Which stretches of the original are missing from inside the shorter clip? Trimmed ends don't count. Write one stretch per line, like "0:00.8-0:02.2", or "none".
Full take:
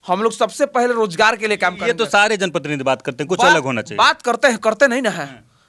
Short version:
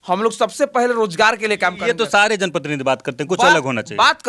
none